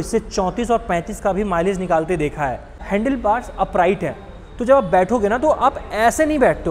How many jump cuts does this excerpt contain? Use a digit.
1